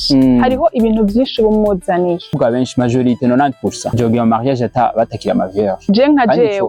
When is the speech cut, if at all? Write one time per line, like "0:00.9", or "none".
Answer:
0:02.3
0:04.0